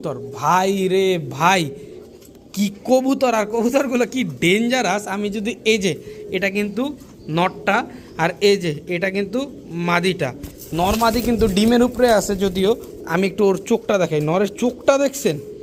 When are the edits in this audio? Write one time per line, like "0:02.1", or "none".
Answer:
none